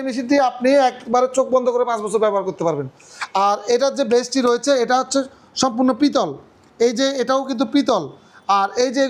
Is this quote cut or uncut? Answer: uncut